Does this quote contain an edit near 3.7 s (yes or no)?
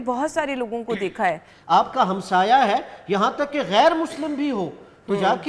no